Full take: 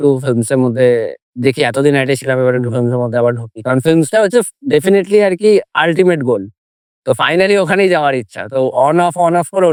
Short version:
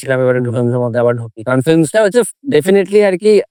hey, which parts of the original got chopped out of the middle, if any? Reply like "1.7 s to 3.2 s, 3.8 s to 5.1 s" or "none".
none